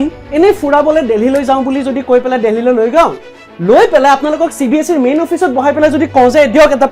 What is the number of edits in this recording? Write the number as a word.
zero